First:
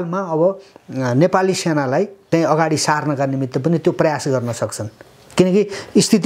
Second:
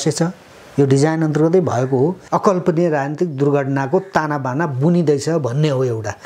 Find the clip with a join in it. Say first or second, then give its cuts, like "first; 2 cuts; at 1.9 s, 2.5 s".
second; 1 cut; at 2.2 s